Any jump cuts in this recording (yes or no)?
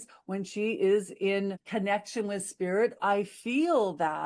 yes